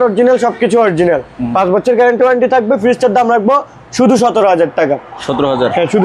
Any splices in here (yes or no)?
no